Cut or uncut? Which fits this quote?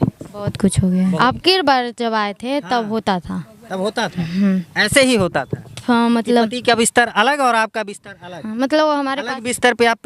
cut